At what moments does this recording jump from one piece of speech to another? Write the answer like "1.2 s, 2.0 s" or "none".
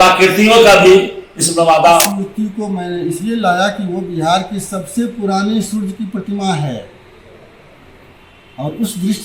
2.1 s